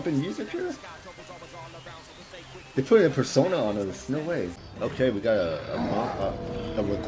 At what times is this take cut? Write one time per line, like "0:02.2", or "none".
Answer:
0:04.6